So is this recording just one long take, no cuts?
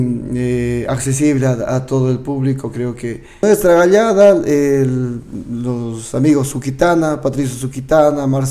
no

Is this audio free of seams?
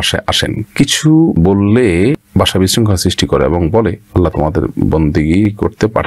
yes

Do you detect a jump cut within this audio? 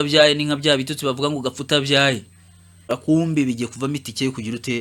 yes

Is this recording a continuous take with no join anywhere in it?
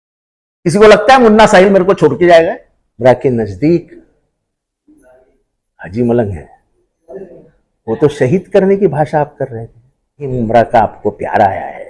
no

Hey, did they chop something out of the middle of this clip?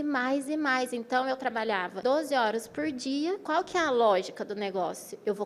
yes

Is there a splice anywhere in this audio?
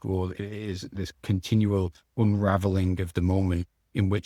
no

